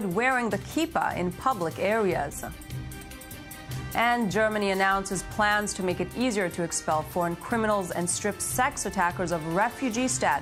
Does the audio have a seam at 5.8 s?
no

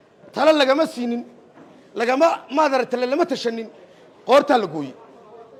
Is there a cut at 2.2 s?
no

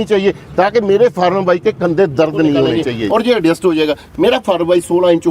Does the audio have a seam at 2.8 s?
yes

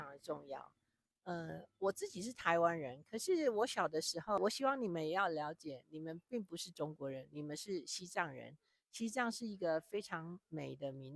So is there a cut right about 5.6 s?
no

